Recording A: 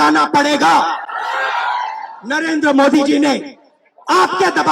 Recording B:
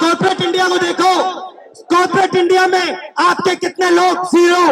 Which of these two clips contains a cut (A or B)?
A